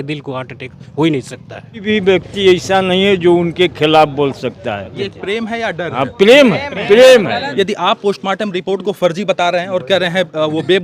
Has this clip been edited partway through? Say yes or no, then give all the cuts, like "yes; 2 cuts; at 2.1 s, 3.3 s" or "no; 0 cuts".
yes; 3 cuts; at 1.8 s, 5.0 s, 7.4 s